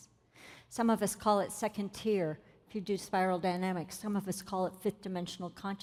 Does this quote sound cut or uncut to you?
uncut